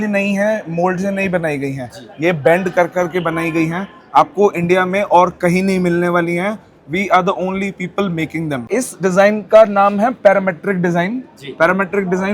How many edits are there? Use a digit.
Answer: 1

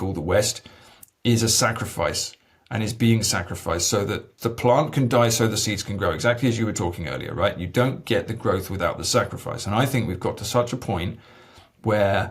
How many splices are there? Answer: 1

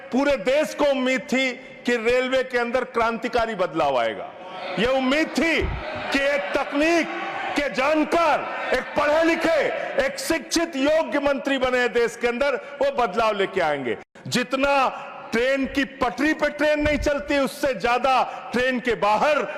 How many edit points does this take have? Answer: 1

